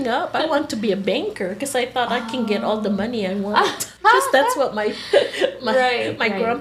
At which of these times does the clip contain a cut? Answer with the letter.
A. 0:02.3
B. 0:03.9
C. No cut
B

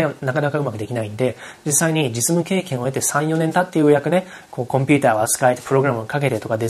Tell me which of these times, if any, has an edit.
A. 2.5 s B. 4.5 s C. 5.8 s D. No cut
D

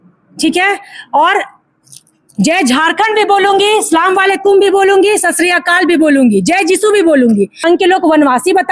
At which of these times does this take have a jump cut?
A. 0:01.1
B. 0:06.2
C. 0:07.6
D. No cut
C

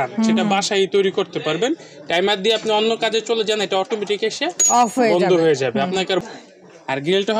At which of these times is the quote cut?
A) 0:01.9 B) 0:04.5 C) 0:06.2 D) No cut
C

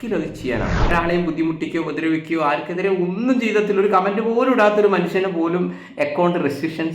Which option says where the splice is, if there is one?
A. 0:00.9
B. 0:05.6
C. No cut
A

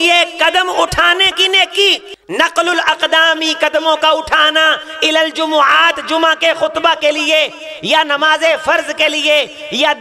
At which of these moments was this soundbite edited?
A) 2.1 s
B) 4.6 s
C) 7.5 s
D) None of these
A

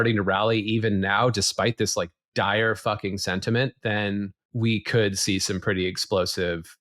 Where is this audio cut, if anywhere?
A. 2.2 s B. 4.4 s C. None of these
B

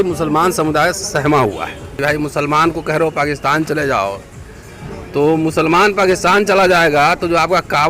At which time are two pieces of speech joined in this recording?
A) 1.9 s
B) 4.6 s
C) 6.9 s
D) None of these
A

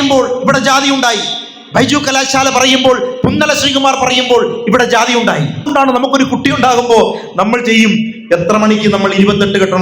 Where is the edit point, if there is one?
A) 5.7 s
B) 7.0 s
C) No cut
A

